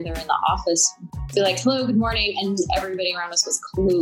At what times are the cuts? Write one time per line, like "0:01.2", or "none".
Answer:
0:01.0